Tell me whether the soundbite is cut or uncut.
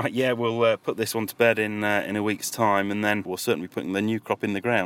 cut